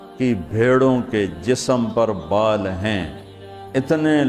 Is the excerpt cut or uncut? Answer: uncut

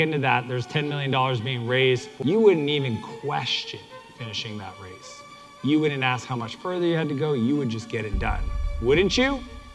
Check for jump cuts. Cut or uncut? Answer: cut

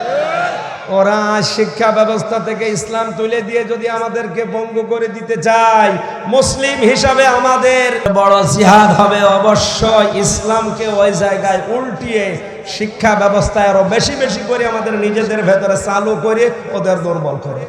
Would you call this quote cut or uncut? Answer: cut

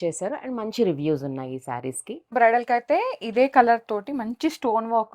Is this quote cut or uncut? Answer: cut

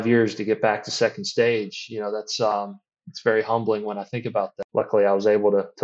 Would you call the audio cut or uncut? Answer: cut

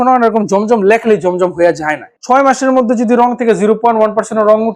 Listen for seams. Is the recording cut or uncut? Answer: cut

